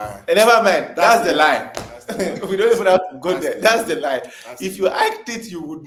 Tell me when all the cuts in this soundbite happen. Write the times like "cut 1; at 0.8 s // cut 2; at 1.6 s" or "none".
none